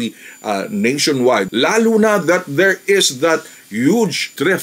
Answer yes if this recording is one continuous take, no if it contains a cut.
no